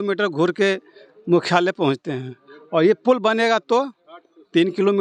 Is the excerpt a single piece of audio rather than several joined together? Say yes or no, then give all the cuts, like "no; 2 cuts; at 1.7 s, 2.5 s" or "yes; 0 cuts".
yes; 0 cuts